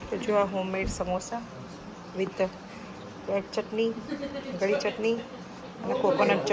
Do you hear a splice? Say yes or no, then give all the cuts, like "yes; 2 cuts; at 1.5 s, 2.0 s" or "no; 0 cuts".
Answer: no; 0 cuts